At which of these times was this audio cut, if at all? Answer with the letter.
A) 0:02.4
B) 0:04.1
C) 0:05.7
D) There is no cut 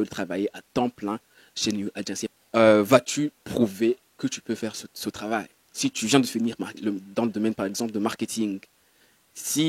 A